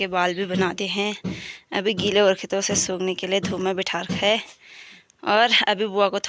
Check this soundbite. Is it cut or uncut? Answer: uncut